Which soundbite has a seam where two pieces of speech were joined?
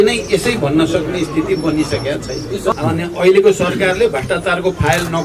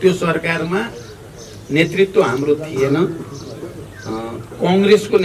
first; 1 cut; at 2.7 s

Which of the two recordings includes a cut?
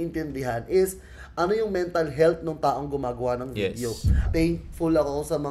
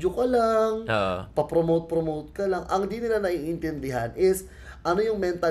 first; 1 cut; at 4.3 s

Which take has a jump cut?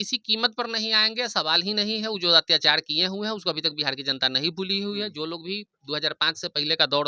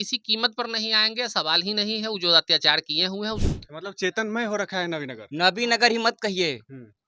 second; 1 cut; at 3.4 s

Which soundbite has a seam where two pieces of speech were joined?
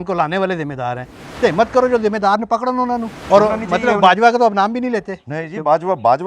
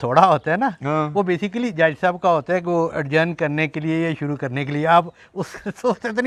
first; 2 cuts; at 1.1 s, 3.2 s

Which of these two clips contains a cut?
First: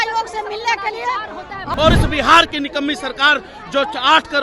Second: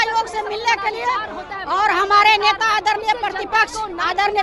first; 1 cut; at 1.6 s

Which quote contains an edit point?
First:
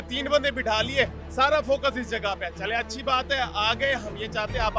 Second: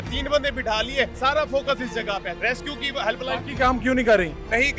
second; 2 cuts; at 1.1 s, 2.4 s

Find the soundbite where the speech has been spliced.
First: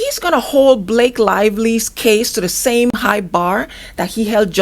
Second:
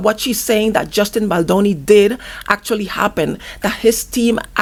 first; 1 cut; at 2.9 s

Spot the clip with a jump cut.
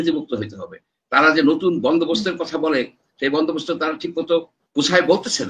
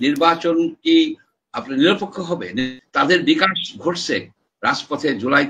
second; 1 cut; at 2.8 s

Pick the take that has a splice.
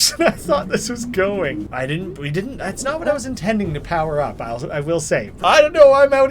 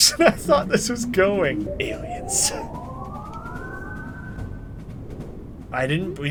first; 2 cuts; at 1.7 s, 5.3 s

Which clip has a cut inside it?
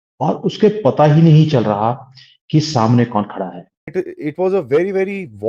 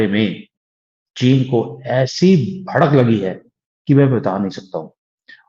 first; 1 cut; at 3.9 s

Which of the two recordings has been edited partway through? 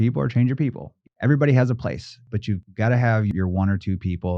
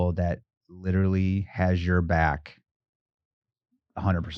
first; 3 cuts; at 1.0 s, 2.2 s, 3.3 s

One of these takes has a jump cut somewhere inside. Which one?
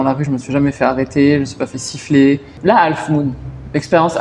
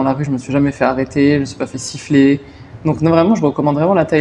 first; 1 cut; at 2.5 s

